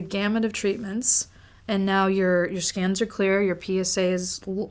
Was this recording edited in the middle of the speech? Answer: no; 0 cuts

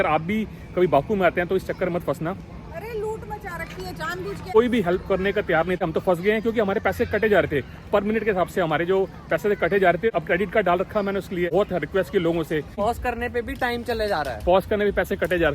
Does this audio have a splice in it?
yes; 5 cuts; at 4.5 s, 5.8 s, 10.1 s, 11.5 s, 12.8 s

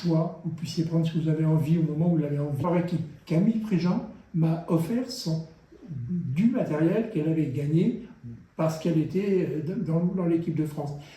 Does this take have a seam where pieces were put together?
yes; 1 cut; at 2.6 s

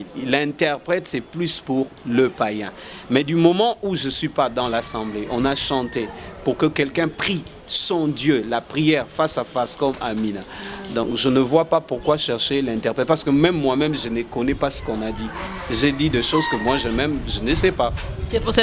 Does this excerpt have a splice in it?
no; 0 cuts

